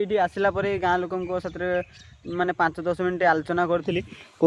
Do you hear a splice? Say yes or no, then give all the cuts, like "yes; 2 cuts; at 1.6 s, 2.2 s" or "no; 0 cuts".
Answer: no; 0 cuts